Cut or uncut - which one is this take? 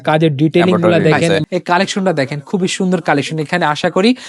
cut